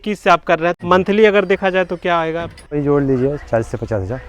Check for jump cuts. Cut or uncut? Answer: cut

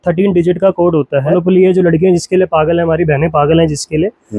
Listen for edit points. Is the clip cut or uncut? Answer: cut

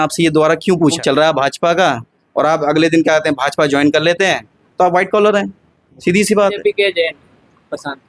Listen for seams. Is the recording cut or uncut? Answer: cut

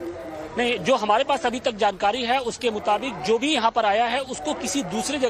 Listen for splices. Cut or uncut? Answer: cut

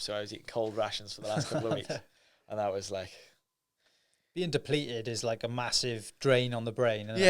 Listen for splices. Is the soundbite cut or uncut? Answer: uncut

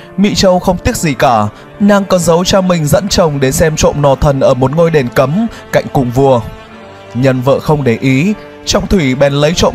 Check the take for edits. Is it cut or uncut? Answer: uncut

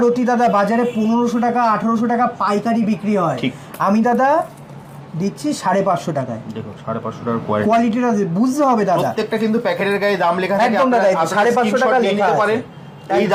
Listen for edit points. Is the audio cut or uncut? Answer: uncut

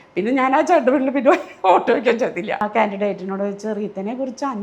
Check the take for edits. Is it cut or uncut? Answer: cut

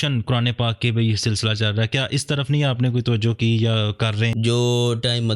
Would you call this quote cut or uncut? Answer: cut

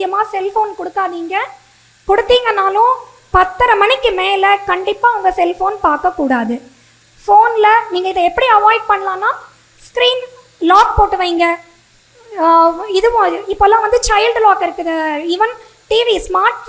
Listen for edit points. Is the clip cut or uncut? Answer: uncut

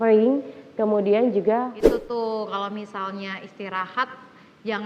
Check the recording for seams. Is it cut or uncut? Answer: cut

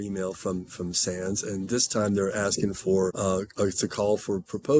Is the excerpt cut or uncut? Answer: cut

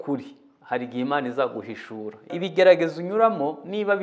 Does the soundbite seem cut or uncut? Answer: cut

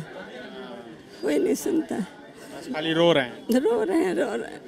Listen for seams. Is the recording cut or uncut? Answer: uncut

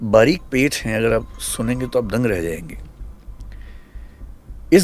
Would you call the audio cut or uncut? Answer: uncut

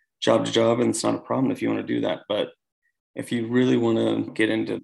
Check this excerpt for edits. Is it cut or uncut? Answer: uncut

